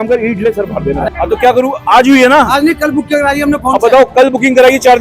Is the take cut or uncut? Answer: cut